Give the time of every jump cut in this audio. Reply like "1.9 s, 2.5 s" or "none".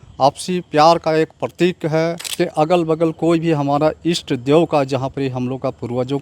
2.2 s